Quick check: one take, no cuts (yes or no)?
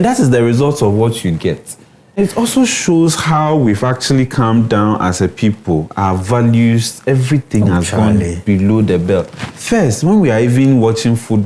no